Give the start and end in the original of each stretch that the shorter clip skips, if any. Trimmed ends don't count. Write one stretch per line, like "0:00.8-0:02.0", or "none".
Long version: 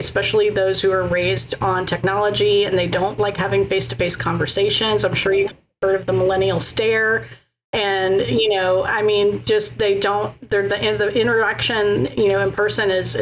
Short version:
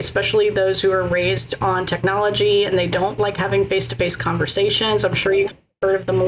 none